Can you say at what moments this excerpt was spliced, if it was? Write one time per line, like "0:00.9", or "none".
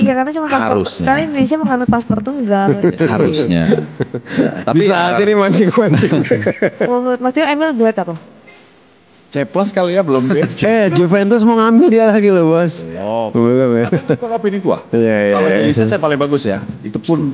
0:06.9